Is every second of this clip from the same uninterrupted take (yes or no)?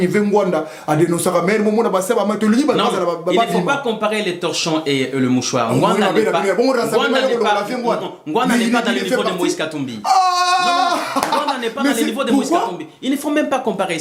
yes